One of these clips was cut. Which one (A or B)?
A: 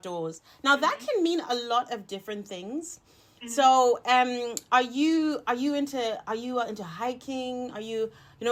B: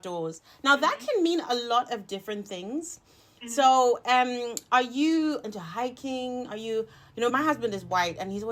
B